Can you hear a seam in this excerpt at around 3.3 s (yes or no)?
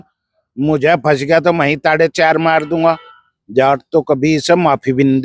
yes